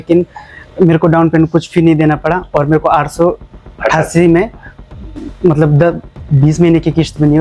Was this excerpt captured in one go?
yes; 0 cuts

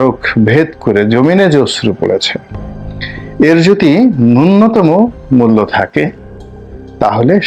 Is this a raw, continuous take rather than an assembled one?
yes; 0 cuts

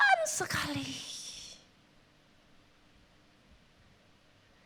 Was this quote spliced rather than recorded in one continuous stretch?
no; 0 cuts

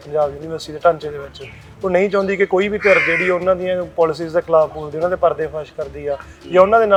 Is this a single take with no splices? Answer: yes; 0 cuts

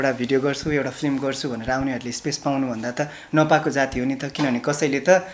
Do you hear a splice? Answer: no; 0 cuts

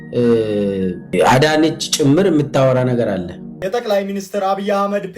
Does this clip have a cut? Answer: yes; 1 cut; at 3.5 s

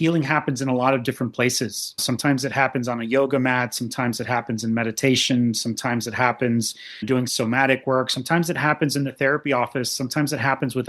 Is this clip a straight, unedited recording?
no; 2 cuts; at 2.0 s, 7.1 s

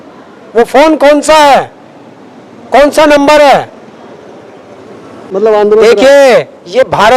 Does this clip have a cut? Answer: yes; 1 cut; at 5.2 s

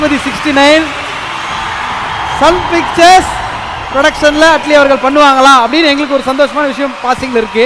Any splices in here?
yes; 1 cut; at 0.9 s

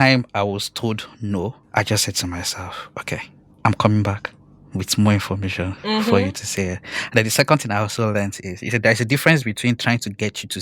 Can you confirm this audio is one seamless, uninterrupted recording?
no; 2 cuts; at 1.6 s, 3.4 s

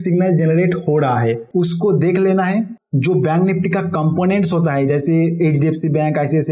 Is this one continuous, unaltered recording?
no; 1 cut; at 1.4 s

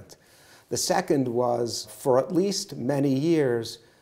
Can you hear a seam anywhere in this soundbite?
yes; 1 cut; at 1.9 s

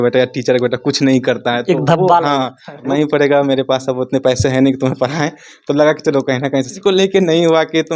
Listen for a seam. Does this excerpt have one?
yes; 2 cuts; at 2.9 s, 6.8 s

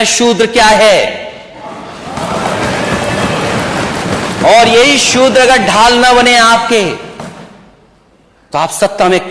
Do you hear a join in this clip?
no; 0 cuts

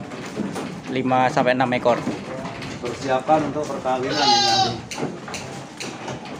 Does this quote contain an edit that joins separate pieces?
no; 0 cuts

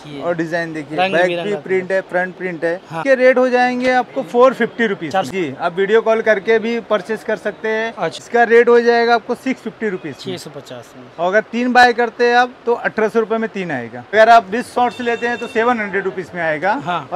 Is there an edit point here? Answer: yes; 4 cuts; at 3.0 s, 5.3 s, 8.2 s, 14.1 s

